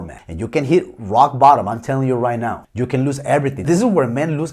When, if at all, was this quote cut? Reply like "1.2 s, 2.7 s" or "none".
none